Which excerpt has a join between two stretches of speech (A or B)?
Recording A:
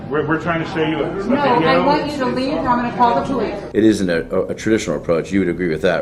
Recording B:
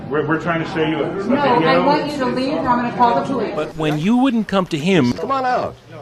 B